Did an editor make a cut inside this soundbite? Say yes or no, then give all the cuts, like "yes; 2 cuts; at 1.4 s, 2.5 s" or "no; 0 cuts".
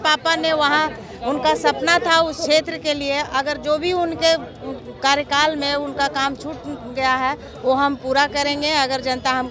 no; 0 cuts